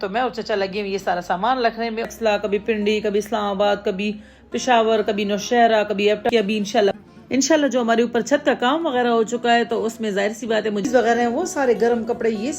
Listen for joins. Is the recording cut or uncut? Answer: cut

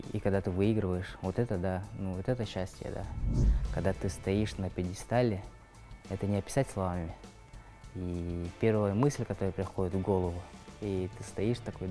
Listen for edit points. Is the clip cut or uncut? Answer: cut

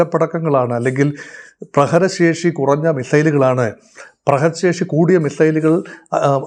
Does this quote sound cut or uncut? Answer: uncut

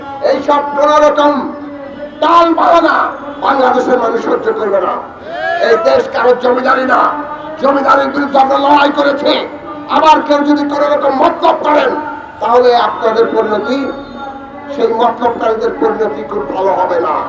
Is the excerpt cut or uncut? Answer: uncut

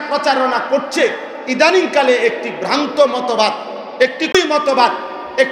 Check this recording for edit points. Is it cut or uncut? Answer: cut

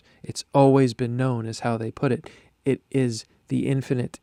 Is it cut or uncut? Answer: uncut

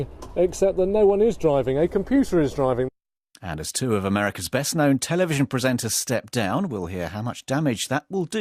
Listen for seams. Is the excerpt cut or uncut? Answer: cut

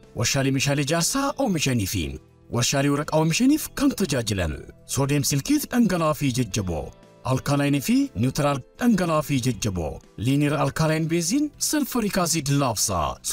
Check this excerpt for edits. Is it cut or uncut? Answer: uncut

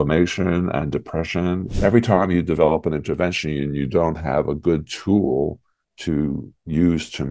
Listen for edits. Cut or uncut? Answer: cut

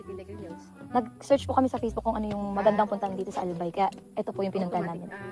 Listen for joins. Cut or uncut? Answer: uncut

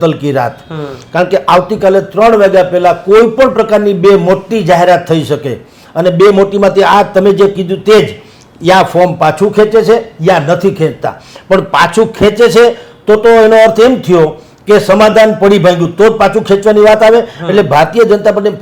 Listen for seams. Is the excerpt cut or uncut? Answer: uncut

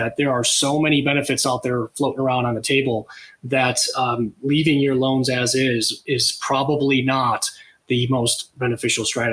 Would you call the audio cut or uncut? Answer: uncut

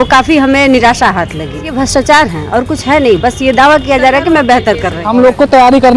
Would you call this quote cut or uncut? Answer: cut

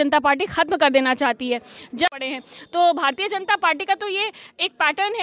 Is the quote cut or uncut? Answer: cut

